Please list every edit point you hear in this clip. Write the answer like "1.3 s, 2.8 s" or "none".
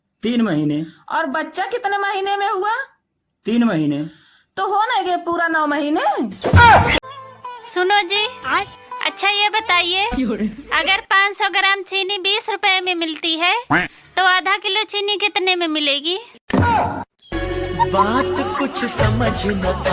none